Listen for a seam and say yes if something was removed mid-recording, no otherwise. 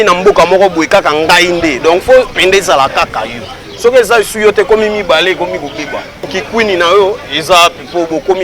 yes